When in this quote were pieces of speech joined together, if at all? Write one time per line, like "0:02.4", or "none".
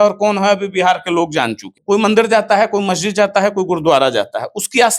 0:01.7